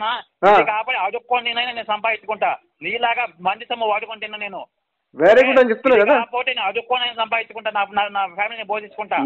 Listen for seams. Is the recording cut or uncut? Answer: uncut